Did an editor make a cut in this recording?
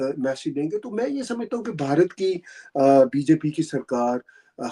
no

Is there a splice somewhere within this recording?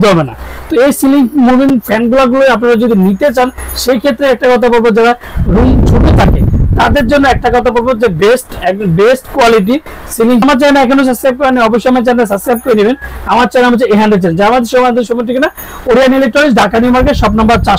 no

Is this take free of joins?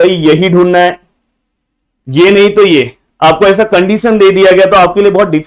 yes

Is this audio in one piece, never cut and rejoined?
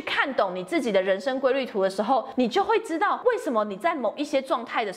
no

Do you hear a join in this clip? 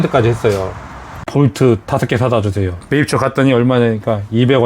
yes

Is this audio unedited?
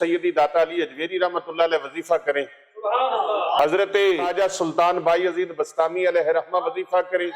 no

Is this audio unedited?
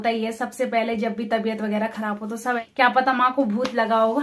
no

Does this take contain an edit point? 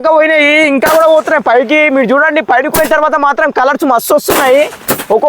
no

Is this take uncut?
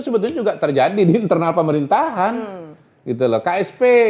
yes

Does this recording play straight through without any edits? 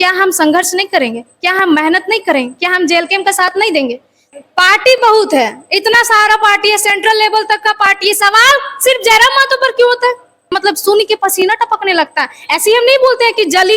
no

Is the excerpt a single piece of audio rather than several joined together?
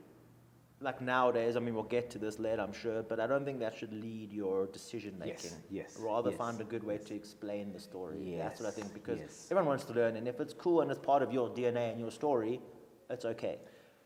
yes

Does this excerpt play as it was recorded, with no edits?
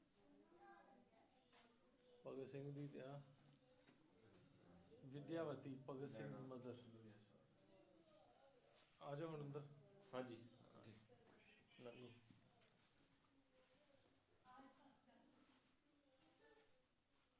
yes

